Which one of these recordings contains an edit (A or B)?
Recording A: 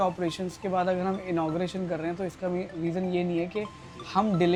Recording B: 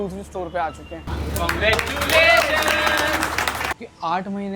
B